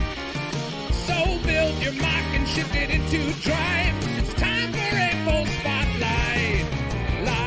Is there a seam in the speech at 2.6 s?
no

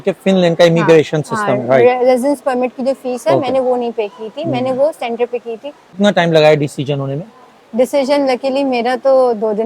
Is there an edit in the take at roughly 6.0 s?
yes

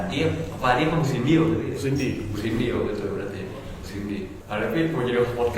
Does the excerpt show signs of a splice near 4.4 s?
yes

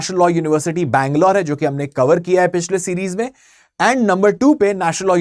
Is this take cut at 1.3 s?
no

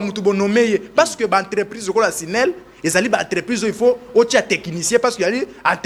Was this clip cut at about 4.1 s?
no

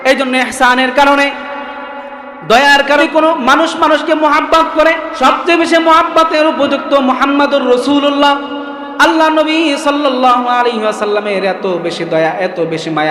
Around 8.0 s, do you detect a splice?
no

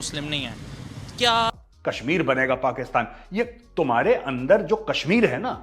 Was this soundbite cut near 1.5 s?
yes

